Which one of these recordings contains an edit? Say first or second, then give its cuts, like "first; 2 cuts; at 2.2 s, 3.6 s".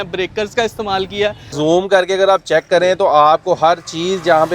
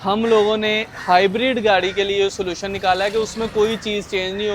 first; 1 cut; at 1.5 s